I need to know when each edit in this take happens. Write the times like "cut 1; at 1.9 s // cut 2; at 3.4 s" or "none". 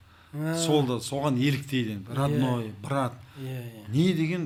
none